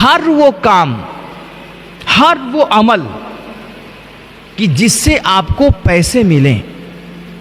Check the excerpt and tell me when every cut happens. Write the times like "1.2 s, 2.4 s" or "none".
none